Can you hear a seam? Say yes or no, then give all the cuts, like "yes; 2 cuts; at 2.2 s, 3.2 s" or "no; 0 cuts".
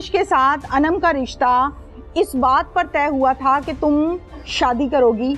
no; 0 cuts